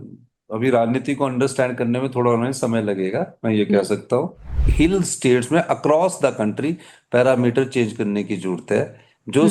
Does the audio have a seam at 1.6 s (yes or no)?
no